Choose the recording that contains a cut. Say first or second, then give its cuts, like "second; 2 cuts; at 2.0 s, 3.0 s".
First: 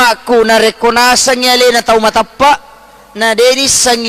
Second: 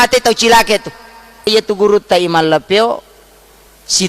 second; 1 cut; at 1.5 s